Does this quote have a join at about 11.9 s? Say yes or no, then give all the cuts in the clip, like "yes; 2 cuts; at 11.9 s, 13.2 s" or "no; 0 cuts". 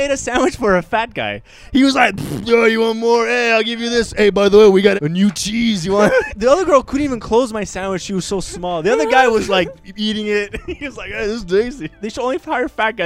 yes; 3 cuts; at 4.9 s, 6.3 s, 11.9 s